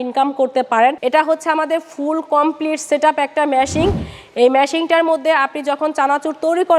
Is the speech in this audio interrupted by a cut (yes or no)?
yes